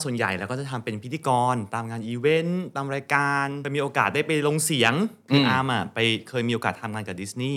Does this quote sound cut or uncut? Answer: cut